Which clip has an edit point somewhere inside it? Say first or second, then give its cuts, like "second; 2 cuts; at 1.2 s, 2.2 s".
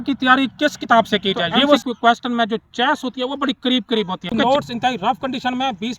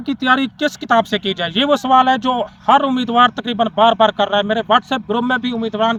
first; 2 cuts; at 1.8 s, 4.4 s